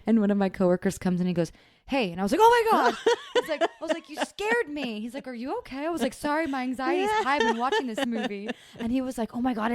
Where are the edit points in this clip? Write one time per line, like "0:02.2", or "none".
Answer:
0:08.1